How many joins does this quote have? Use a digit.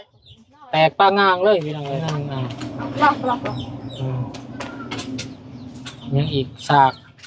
1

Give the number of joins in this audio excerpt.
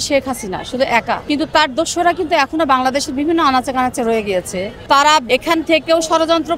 3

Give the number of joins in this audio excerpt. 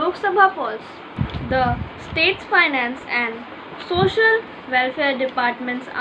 1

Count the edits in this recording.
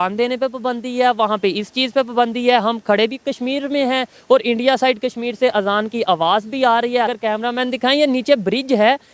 1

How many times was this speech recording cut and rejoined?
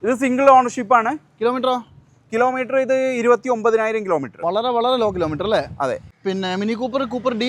1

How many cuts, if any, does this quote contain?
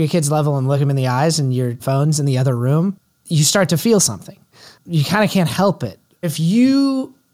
4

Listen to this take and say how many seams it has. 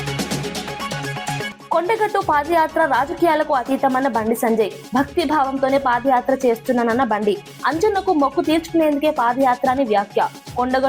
1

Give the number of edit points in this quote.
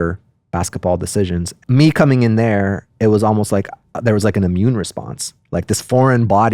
1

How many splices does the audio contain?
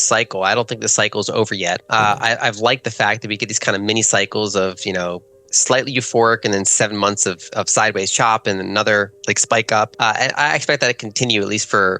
2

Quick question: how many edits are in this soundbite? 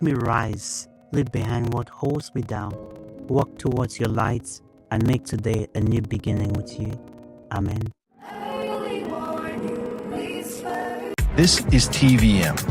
1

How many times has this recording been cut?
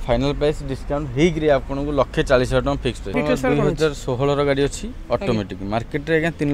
1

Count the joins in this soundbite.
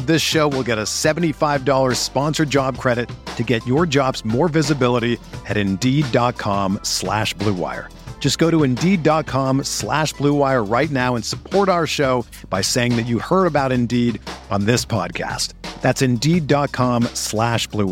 0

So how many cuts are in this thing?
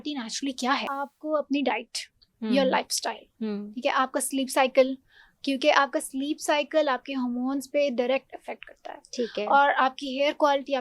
1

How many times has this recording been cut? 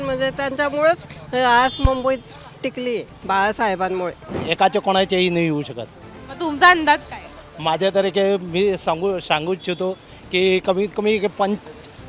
1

